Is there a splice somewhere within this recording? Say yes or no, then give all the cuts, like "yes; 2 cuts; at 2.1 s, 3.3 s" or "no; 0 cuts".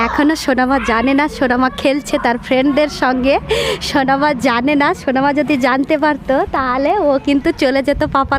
no; 0 cuts